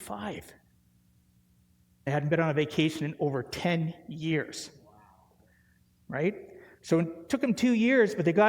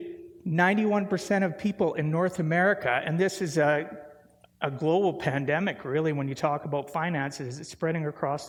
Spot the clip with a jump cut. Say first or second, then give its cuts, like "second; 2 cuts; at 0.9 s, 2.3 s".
first; 1 cut; at 2.1 s